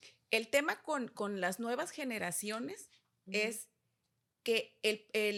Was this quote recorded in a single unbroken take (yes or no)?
yes